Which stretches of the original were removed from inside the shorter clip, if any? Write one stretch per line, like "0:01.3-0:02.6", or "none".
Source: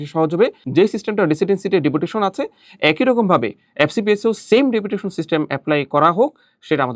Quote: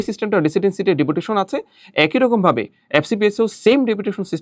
none